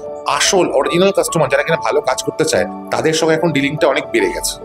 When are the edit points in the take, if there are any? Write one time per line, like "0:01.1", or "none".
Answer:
none